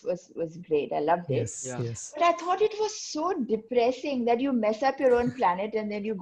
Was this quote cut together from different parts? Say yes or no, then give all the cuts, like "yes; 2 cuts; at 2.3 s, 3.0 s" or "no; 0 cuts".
no; 0 cuts